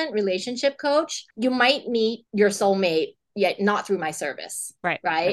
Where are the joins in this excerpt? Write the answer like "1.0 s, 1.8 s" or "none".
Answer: 1.2 s, 2.2 s